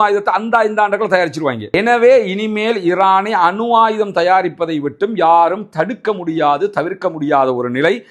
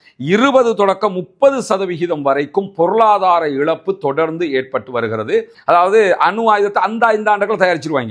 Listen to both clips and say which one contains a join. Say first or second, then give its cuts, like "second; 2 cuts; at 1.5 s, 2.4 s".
second; 1 cut; at 5.5 s